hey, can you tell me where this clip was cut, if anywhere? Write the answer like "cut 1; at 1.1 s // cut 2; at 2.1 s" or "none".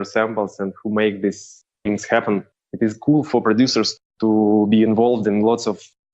cut 1; at 2.6 s

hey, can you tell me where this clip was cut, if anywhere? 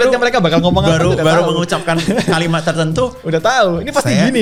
none

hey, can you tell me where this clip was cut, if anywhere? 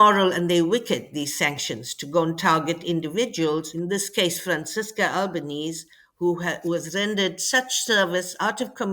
cut 1; at 3.7 s

